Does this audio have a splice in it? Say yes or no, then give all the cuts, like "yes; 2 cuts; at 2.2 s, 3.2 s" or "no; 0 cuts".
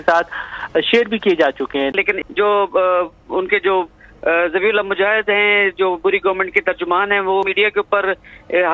yes; 1 cut; at 2.0 s